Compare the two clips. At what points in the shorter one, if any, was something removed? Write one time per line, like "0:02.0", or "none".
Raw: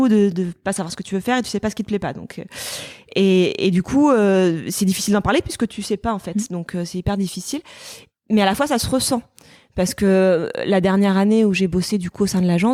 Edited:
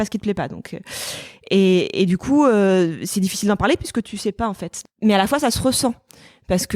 0:04.6